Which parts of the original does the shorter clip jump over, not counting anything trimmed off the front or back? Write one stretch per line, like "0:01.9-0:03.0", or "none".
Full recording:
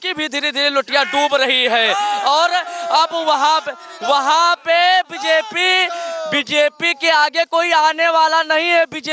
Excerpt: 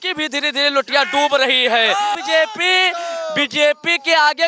0:02.2-0:05.1